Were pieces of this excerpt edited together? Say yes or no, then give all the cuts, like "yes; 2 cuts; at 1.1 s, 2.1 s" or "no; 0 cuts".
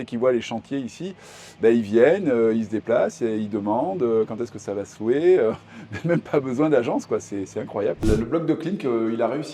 yes; 1 cut; at 8.0 s